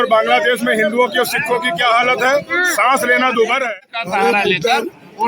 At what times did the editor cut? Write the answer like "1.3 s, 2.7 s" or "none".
3.7 s